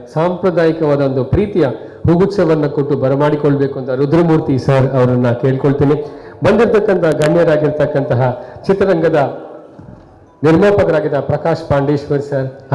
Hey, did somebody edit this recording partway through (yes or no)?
no